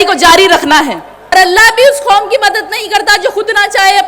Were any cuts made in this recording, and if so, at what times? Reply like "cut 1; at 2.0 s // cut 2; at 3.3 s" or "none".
cut 1; at 1.3 s